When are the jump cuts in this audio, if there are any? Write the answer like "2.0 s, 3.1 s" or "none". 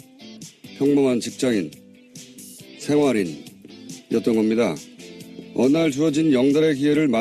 4.2 s